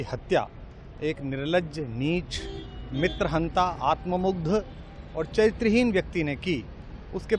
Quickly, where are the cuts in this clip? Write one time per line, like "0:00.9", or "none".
none